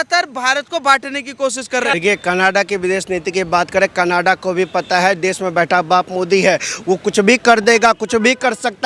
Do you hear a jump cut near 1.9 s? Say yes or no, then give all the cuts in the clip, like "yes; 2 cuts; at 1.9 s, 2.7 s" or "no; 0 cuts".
yes; 1 cut; at 1.9 s